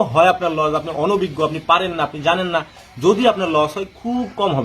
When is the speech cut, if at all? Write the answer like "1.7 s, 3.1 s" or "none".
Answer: none